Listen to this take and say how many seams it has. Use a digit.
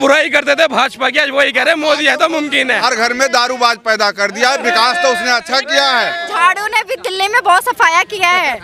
2